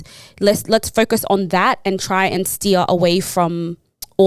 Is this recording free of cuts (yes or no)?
yes